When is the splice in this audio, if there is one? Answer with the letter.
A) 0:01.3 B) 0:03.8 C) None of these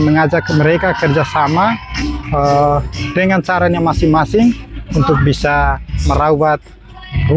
C